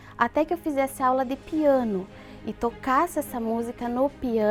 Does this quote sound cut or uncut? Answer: uncut